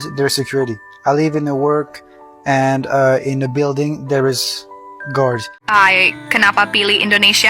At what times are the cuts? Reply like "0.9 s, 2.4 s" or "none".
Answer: 5.6 s